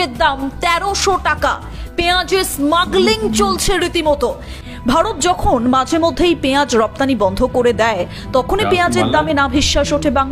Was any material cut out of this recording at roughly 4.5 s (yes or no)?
yes